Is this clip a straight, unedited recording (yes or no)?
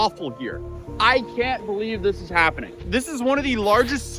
no